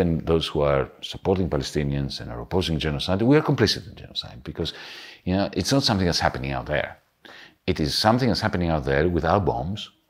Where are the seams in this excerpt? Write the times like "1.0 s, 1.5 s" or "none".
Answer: none